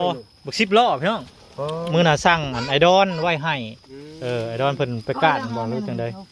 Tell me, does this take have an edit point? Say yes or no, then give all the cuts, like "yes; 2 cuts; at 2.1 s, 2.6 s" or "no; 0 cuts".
yes; 1 cut; at 1.9 s